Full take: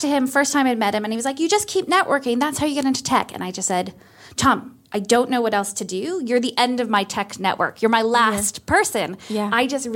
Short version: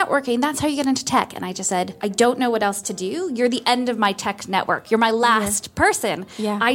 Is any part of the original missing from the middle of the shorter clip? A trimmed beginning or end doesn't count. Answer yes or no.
yes